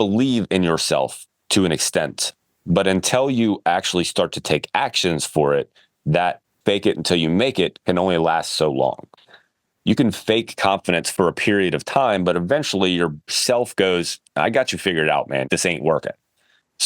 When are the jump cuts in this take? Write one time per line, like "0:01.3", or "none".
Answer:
0:06.5
0:15.5